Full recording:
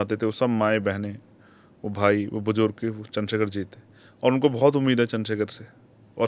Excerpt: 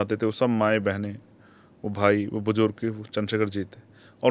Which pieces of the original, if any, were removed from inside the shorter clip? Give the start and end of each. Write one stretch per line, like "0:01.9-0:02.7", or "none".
none